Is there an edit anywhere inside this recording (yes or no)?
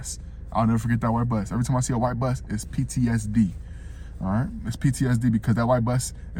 no